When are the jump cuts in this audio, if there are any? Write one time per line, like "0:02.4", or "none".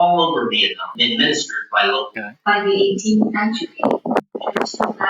0:02.1